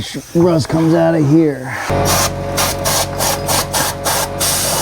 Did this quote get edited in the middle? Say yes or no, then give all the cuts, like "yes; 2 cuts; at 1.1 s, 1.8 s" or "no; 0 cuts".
yes; 1 cut; at 1.9 s